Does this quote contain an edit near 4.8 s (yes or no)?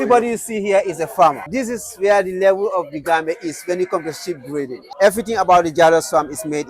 yes